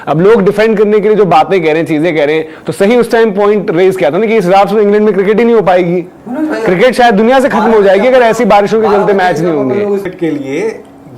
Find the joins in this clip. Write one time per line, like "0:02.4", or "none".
0:10.1

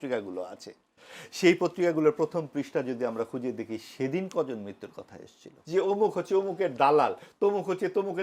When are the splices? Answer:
0:05.5

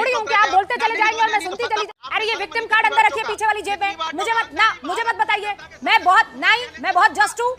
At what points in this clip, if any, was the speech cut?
0:01.8
0:03.9

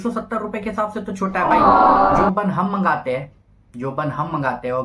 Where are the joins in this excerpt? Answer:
none

